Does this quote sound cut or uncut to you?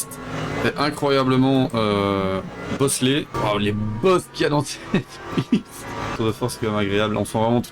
cut